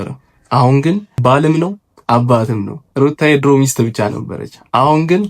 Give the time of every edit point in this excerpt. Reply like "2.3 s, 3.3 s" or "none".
1.1 s, 1.9 s